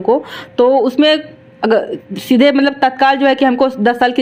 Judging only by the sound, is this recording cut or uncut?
uncut